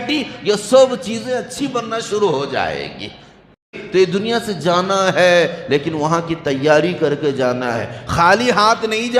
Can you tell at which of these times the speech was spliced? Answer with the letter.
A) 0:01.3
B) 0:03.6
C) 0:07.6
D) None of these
B